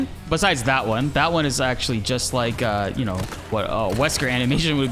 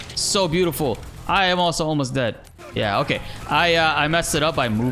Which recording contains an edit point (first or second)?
second